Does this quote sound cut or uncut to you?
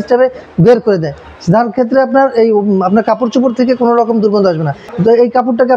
cut